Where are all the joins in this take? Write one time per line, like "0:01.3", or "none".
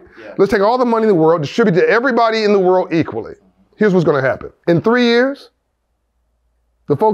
0:04.5

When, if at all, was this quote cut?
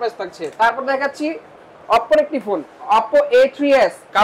none

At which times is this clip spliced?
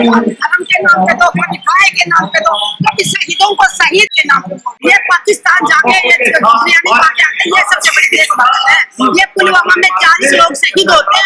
0:04.2

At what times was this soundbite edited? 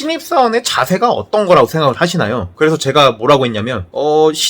none

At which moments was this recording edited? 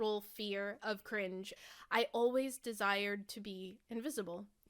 0:01.5

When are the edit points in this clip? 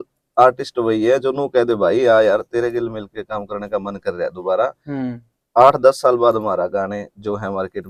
none

